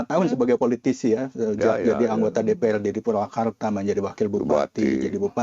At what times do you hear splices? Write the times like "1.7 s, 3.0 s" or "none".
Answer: none